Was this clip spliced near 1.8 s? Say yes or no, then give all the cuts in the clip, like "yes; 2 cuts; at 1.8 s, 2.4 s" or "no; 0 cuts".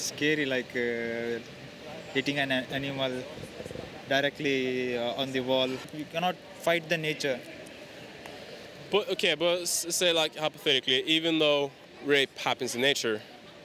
no; 2 cuts; at 5.9 s, 11.8 s